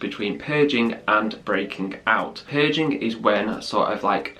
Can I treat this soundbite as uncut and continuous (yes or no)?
yes